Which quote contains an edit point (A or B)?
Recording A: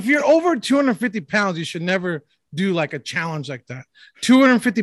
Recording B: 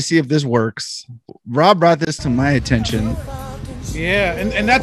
B